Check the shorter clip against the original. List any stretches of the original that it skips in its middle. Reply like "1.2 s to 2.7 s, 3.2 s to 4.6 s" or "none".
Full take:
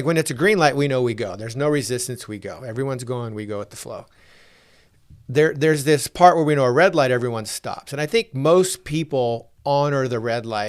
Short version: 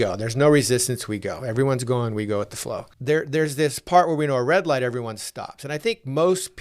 4.1 s to 5.2 s